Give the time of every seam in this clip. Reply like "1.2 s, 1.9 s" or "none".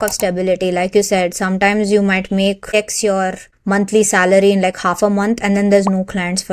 none